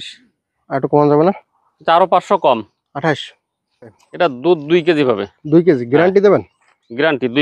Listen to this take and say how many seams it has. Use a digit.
1